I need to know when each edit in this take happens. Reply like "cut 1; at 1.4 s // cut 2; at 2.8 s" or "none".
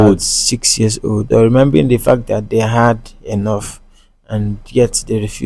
cut 1; at 1.3 s